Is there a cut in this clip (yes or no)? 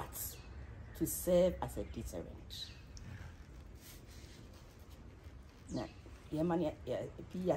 no